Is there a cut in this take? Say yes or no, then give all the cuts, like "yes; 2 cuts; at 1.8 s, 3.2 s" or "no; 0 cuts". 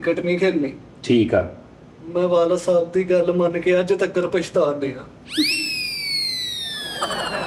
no; 0 cuts